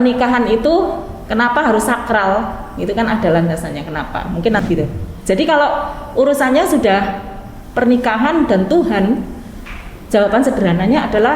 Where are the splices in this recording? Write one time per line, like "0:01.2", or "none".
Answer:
0:04.6

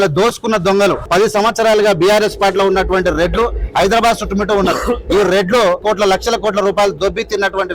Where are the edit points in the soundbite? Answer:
0:01.0
0:05.8
0:07.0

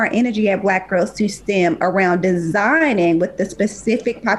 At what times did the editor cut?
none

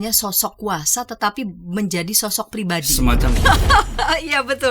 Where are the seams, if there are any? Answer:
0:03.3

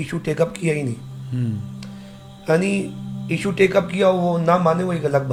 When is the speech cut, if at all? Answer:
none

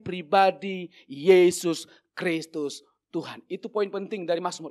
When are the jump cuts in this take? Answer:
none

